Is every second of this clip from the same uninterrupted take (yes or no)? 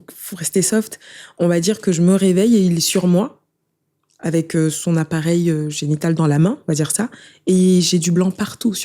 yes